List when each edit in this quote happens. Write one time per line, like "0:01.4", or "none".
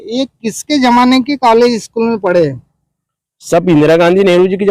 none